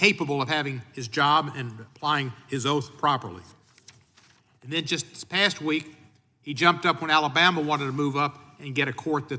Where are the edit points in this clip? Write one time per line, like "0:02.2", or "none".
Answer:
none